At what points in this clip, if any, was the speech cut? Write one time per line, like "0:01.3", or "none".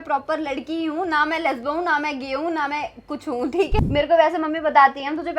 0:03.7